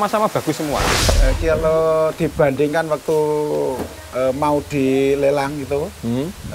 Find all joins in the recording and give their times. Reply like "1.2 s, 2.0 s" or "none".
1.1 s